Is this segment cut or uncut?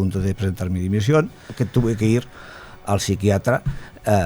cut